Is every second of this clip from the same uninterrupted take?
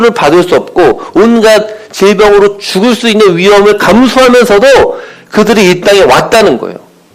yes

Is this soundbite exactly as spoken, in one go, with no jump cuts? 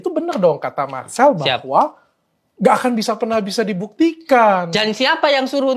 yes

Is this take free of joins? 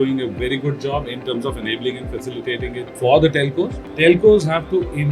no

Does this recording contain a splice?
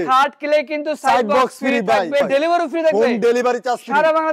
yes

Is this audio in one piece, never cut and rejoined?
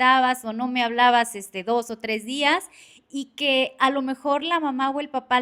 yes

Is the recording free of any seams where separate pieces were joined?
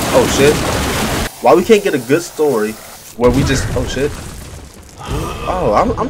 no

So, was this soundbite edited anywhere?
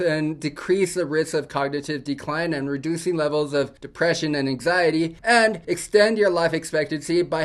no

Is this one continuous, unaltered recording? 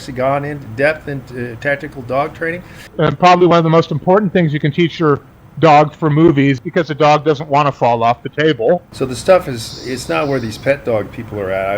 no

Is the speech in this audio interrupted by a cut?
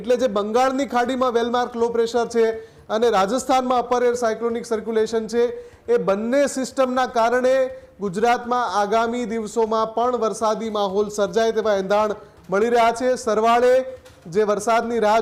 no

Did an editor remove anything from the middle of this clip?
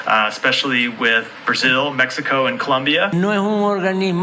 yes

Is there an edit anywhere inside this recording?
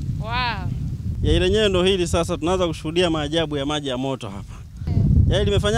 yes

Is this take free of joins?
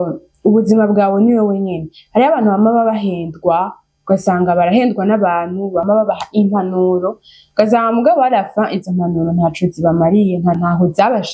no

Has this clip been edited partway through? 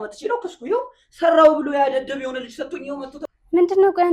yes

